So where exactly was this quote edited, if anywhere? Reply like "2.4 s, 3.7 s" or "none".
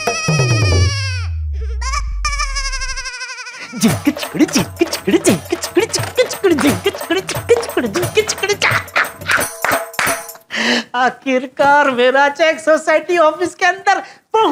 none